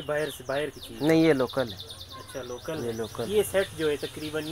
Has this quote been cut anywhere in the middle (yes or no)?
no